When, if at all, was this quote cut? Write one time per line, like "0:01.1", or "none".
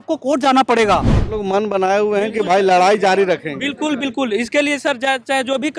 0:01.2

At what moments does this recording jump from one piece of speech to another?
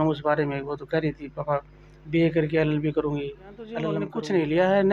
0:04.0

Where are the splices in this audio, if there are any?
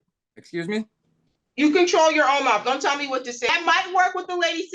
0:03.5

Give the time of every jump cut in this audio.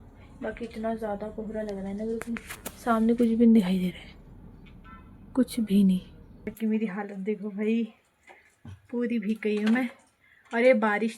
0:06.5

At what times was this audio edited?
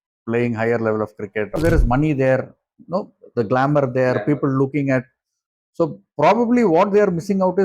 0:01.6

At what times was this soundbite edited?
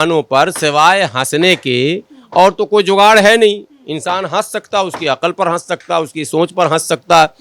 none

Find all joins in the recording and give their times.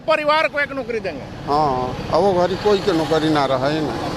none

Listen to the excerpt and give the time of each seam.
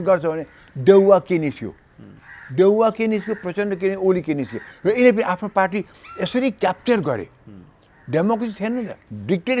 none

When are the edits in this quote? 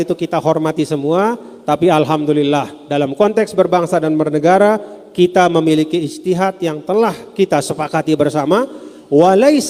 none

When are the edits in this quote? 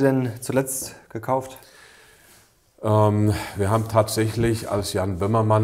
none

